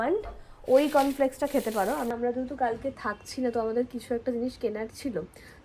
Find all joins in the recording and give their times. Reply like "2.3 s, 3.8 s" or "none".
2.1 s